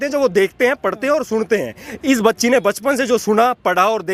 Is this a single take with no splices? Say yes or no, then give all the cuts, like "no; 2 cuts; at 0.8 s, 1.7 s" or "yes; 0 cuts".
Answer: yes; 0 cuts